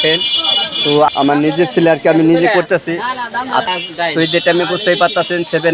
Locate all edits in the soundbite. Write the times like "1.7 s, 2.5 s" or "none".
1.1 s, 3.7 s